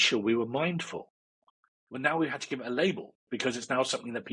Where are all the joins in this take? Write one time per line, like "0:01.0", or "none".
none